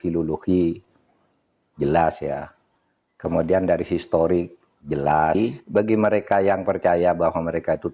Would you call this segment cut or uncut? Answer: cut